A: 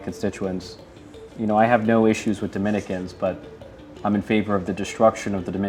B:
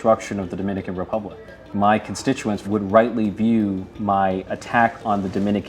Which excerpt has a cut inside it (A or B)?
B